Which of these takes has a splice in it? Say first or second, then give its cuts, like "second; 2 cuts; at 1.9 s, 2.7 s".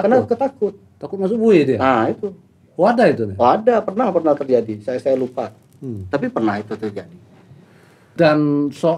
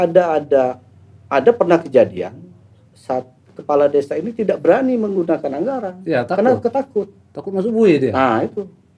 first; 1 cut; at 8.0 s